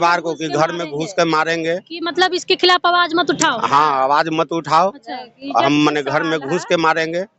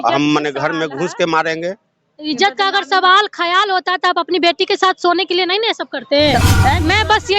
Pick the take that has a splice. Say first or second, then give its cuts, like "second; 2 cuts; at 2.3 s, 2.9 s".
second; 1 cut; at 6.4 s